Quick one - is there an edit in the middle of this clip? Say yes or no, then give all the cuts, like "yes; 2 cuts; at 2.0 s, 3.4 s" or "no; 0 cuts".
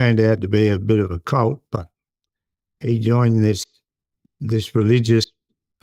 no; 0 cuts